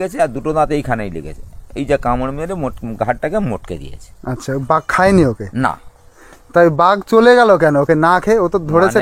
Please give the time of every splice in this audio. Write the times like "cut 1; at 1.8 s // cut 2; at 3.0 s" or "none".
none